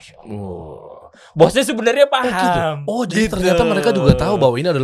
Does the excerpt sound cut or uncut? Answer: uncut